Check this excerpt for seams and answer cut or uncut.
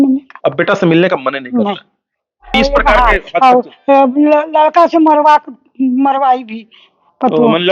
cut